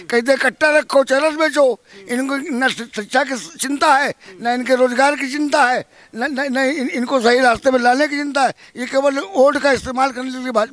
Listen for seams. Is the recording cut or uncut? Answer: uncut